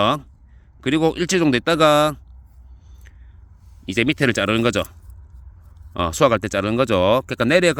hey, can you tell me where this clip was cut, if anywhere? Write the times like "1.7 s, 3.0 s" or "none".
none